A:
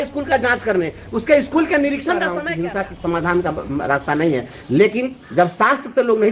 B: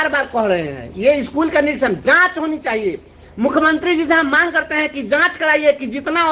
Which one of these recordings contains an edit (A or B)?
A